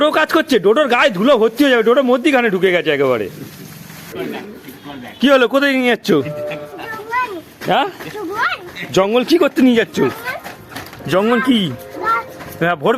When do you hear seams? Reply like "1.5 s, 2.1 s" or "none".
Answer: 4.1 s